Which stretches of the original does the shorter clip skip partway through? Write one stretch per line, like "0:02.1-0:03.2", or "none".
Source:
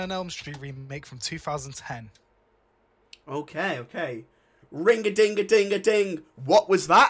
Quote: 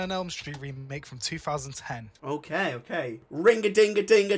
0:02.1-0:03.1
0:04.3-0:04.6